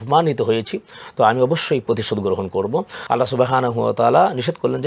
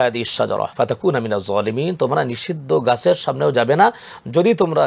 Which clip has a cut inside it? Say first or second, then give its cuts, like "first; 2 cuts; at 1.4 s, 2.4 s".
first; 1 cut; at 2.9 s